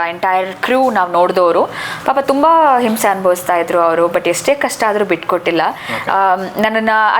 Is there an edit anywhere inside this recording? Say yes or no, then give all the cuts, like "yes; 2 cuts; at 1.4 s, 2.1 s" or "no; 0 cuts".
no; 0 cuts